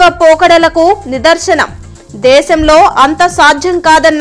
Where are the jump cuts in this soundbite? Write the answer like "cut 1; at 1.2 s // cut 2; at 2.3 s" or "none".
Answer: none